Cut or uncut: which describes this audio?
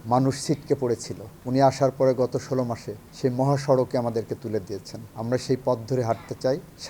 uncut